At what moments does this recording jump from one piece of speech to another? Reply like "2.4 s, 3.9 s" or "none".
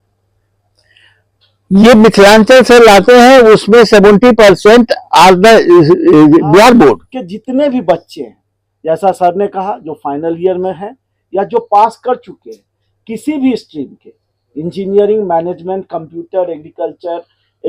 7.1 s